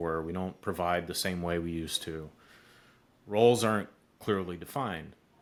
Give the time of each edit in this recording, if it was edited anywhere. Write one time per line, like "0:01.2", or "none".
none